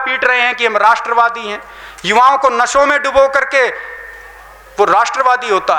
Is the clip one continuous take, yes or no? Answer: yes